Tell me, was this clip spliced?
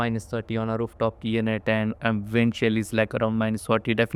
no; 0 cuts

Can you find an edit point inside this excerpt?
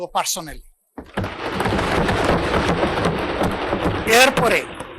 no; 0 cuts

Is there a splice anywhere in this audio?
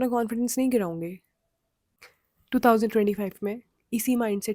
yes; 1 cut; at 1.8 s

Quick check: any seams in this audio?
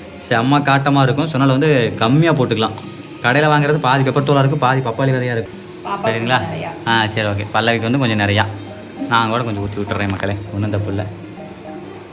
yes; 1 cut; at 5.5 s

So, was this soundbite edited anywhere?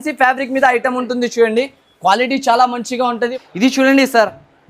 yes; 1 cut; at 3.2 s

